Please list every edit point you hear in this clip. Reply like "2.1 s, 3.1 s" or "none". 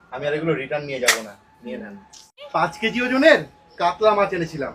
2.4 s

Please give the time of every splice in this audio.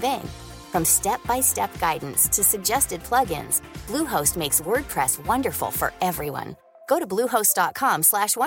none

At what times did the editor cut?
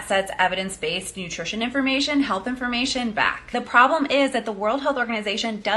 3.4 s

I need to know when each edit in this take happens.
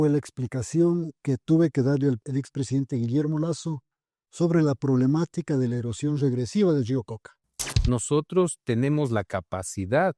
2.2 s, 7.6 s

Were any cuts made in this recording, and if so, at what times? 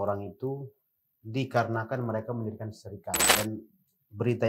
3.2 s

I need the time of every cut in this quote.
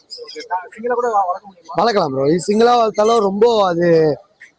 none

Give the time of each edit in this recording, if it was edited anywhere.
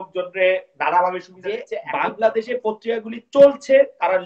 1.8 s

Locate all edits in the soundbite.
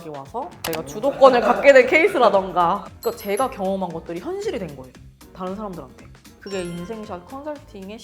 2.9 s, 6.3 s

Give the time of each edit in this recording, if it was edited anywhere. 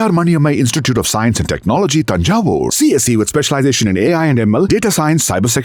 none

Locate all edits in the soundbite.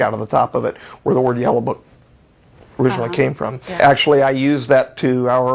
3.8 s

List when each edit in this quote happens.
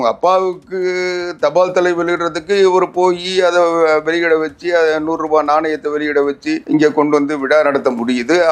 6.6 s

